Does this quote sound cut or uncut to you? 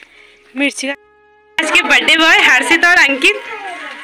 cut